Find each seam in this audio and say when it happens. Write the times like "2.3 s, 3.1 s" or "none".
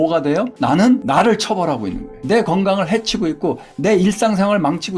2.1 s